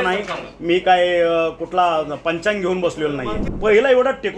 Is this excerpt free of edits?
no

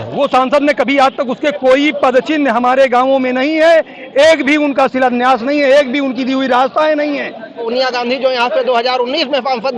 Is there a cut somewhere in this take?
yes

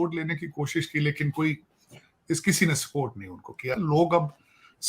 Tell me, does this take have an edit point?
yes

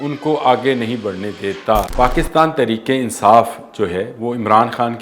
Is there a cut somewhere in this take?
yes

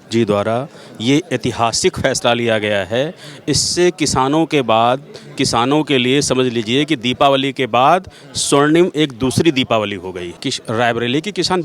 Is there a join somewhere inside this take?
yes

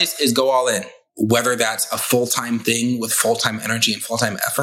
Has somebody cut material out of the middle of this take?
yes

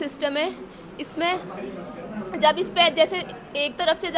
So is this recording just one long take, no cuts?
yes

